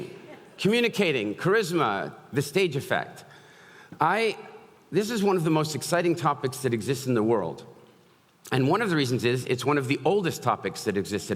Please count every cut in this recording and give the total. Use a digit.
0